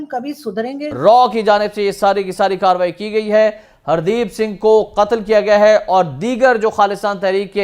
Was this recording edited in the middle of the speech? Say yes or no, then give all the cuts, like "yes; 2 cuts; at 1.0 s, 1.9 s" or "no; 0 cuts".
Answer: yes; 1 cut; at 1.0 s